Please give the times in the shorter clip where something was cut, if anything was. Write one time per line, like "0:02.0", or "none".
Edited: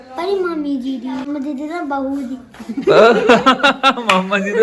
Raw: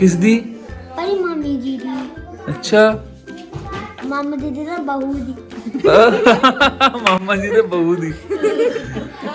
0:01.3